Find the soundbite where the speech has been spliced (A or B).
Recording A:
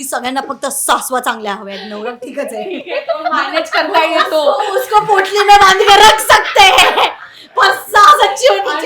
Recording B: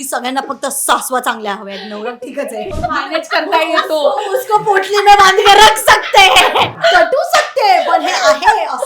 B